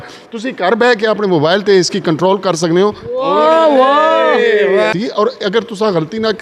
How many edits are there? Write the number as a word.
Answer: one